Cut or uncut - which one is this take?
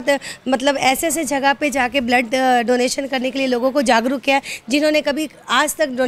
uncut